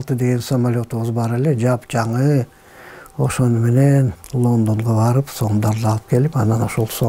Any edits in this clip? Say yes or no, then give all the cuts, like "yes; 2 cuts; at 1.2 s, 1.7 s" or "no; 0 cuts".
no; 0 cuts